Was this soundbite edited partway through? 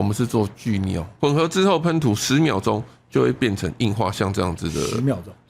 yes; 1 cut; at 1.1 s

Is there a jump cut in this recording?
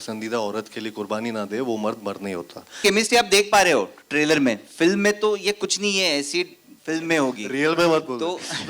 yes; 1 cut; at 2.8 s

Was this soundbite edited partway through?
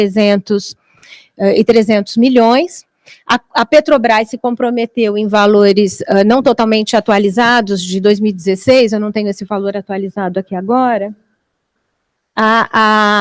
no; 0 cuts

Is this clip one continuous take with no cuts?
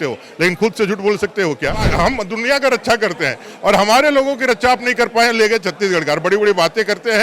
no; 1 cut; at 1.9 s

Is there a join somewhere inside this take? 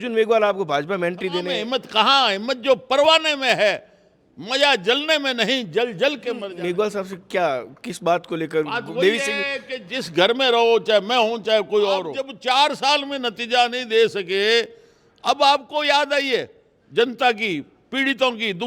yes; 3 cuts; at 1.5 s, 6.5 s, 12.2 s

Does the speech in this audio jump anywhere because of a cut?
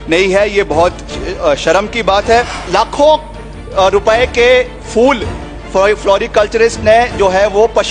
yes; 1 cut; at 2.6 s

